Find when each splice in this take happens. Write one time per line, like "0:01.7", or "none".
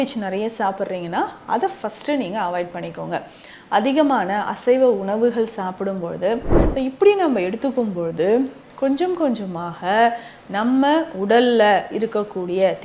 0:06.6

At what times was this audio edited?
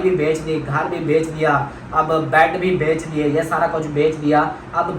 none

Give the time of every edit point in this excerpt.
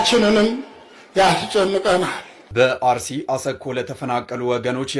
0:02.4

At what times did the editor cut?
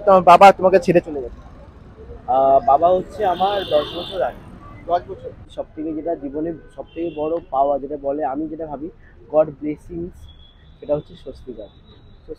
0:05.6

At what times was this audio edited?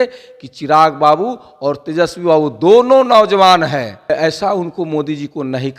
0:04.1

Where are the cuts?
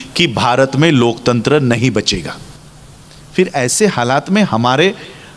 none

